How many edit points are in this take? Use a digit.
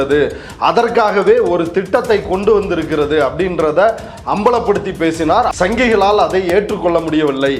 1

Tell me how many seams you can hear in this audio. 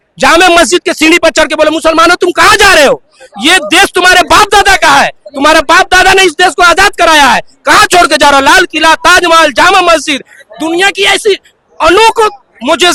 0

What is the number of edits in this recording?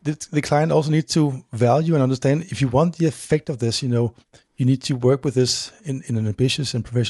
0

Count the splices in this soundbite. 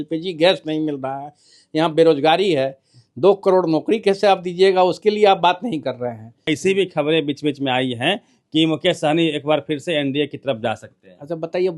1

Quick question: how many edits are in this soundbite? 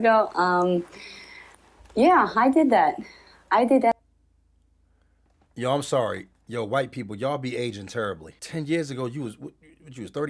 1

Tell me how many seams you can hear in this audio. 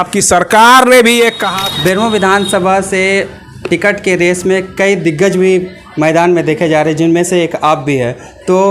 1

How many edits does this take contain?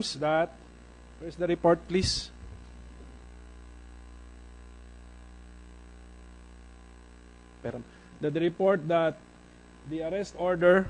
0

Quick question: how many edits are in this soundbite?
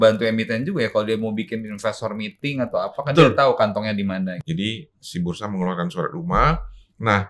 1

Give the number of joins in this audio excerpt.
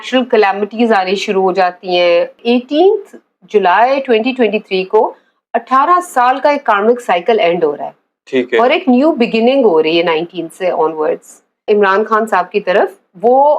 2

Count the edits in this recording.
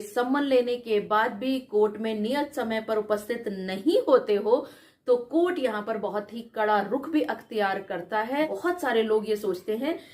1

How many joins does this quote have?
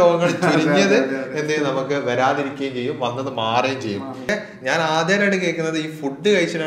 1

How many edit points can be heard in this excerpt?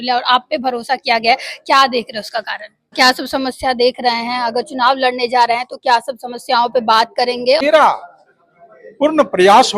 2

